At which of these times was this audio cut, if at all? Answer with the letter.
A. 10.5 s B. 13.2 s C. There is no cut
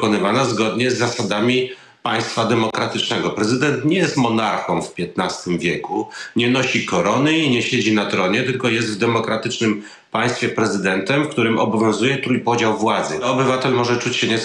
B